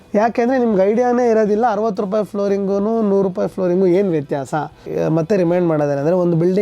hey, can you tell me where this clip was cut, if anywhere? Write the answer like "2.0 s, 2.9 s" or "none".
4.8 s